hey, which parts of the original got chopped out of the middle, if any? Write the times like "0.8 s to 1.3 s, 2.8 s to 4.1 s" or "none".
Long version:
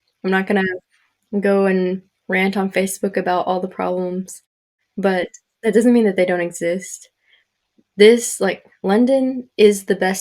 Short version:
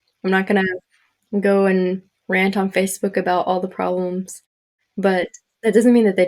none